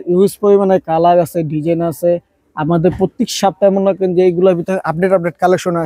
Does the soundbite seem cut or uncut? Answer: uncut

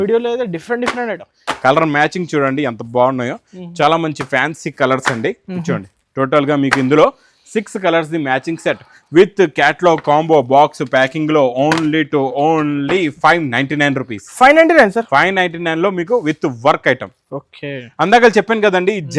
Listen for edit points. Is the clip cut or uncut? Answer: uncut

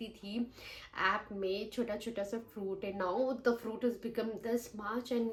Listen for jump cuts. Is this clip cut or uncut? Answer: uncut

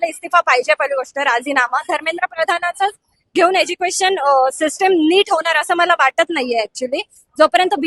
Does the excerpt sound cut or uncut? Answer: uncut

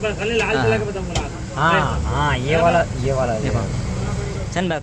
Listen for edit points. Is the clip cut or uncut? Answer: uncut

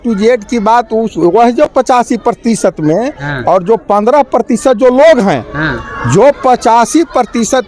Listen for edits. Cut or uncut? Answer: uncut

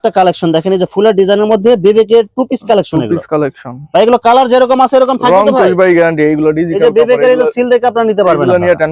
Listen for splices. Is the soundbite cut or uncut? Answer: uncut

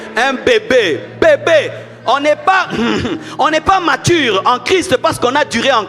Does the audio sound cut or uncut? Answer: uncut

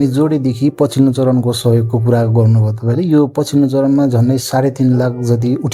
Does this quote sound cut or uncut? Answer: uncut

